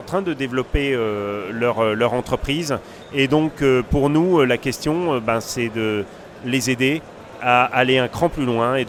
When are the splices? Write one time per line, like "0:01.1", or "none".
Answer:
none